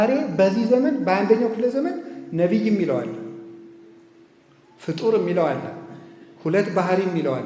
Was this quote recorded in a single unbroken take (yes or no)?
yes